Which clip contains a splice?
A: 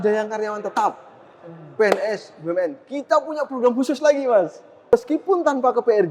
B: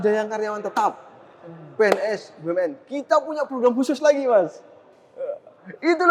A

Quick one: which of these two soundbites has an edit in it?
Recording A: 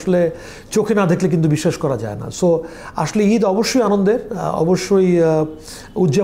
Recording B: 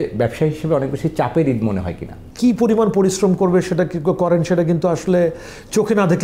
B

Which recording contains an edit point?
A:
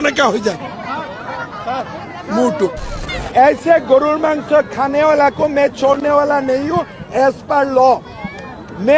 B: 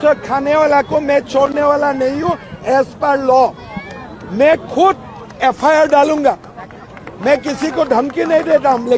A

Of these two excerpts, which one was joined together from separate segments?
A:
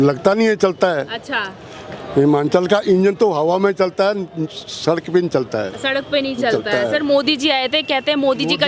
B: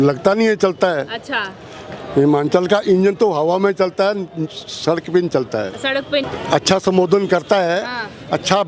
B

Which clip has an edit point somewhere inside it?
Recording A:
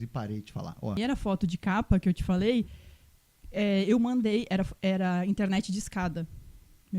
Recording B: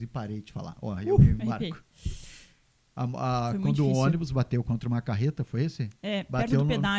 A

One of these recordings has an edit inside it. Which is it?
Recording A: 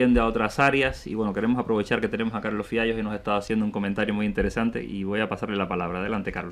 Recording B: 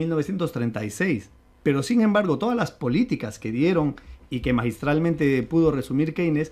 A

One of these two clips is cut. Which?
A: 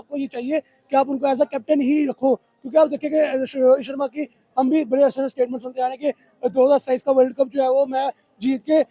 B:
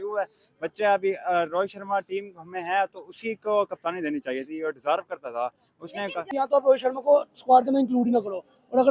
B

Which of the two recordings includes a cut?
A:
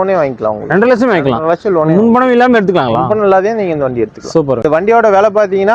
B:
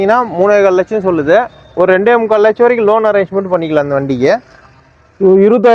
A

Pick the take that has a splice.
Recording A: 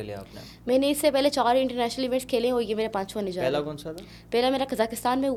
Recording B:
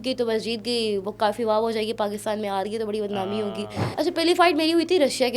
B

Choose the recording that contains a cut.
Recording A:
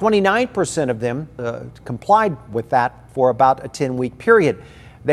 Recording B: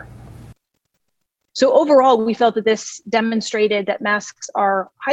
A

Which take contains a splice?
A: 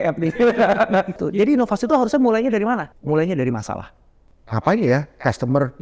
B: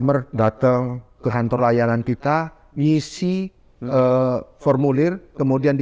A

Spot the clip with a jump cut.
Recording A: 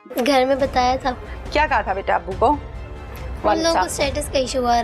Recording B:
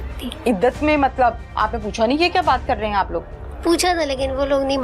A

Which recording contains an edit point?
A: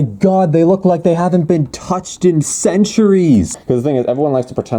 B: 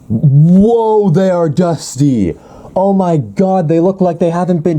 A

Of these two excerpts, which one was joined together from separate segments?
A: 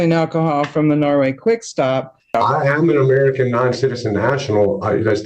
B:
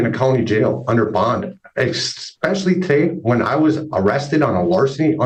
A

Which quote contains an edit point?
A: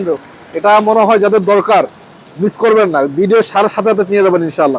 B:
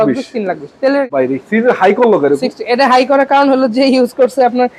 B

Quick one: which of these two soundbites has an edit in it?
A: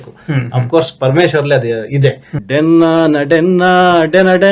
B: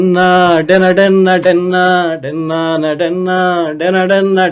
A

